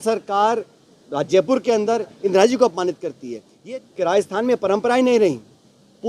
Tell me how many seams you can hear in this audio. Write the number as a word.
one